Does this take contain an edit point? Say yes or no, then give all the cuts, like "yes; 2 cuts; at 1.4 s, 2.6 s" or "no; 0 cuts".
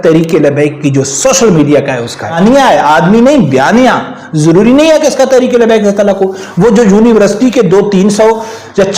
yes; 1 cut; at 2.3 s